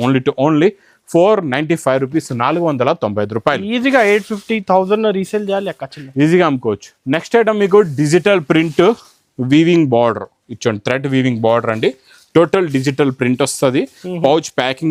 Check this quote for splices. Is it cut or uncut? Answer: uncut